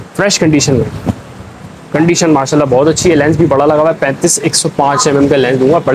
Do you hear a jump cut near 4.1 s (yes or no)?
no